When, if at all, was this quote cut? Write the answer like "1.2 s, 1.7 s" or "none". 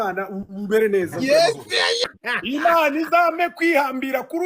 2.0 s